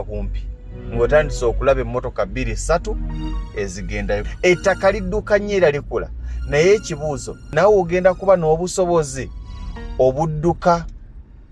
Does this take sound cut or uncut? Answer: cut